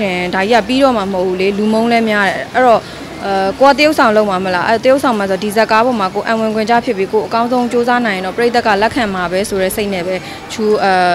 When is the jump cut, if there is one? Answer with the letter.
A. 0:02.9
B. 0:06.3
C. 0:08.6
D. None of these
D